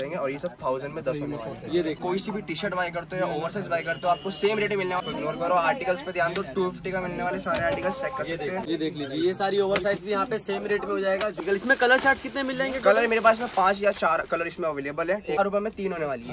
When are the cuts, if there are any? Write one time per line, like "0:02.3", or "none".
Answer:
0:02.0
0:05.0
0:08.6
0:11.4
0:15.4